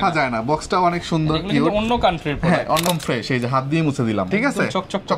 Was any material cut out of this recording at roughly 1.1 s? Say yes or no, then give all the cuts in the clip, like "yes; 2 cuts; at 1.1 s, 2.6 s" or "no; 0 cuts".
no; 2 cuts; at 2.8 s, 4.3 s